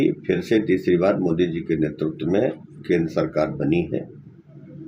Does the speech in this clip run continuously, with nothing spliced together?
yes; 0 cuts

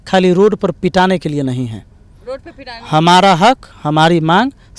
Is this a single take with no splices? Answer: yes; 0 cuts

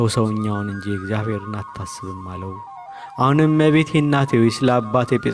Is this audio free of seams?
yes; 0 cuts

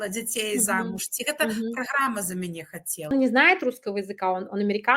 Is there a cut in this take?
yes; 1 cut; at 3.1 s

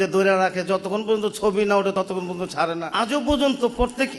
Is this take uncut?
no; 1 cut; at 2.9 s

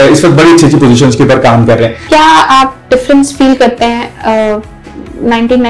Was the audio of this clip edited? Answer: yes; 1 cut; at 2.0 s

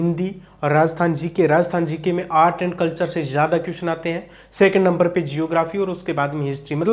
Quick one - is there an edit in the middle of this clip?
no; 0 cuts

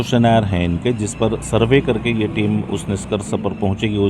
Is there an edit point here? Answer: no; 0 cuts

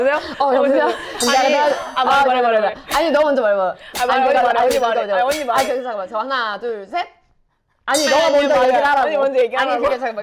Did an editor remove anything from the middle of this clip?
no; 0 cuts

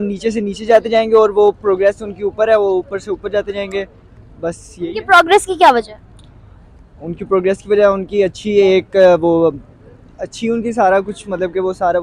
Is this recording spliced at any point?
no; 0 cuts

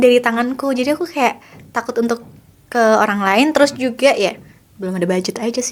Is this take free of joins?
yes; 0 cuts

